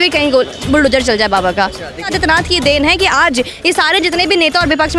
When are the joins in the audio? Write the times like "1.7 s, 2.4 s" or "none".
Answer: 2.1 s